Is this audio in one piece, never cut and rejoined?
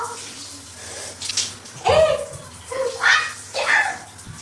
no; 1 cut; at 1.3 s

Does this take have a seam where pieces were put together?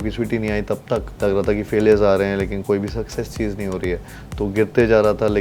yes; 1 cut; at 1.1 s

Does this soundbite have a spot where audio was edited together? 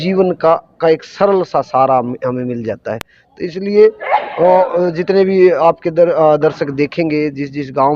no; 0 cuts

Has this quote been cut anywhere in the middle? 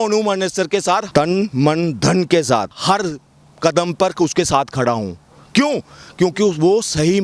yes; 2 cuts; at 1.1 s, 2.7 s

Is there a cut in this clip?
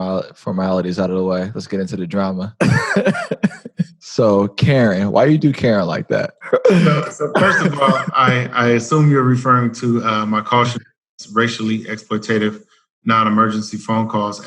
yes; 3 cuts; at 2.5 s, 3.9 s, 6.4 s

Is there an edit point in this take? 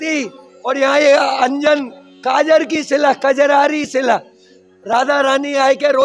no; 0 cuts

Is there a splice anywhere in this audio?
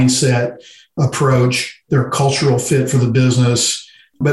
yes; 1 cut; at 1.0 s

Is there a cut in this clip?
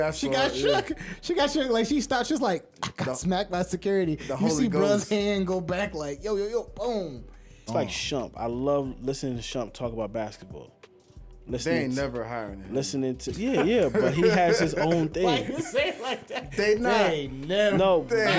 yes; 1 cut; at 7.6 s

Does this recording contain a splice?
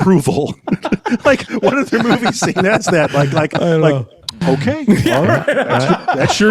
no; 0 cuts

